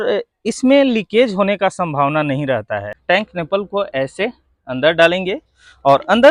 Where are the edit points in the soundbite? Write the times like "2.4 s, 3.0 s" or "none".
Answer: 2.9 s